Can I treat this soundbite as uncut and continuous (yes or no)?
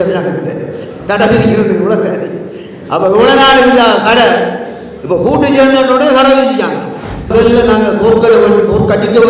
no